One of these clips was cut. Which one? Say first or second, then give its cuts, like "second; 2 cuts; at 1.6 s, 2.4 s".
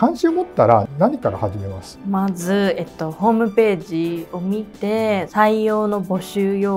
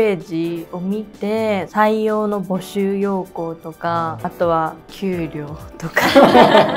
second; 1 cut; at 4.3 s